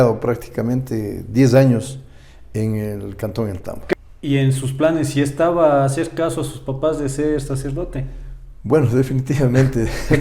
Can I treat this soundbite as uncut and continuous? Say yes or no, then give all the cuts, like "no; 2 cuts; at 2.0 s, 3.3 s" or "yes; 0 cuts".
no; 1 cut; at 3.9 s